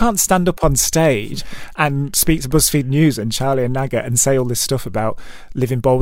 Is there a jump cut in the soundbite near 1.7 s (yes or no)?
no